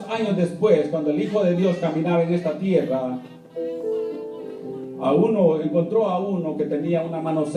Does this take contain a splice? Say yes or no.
yes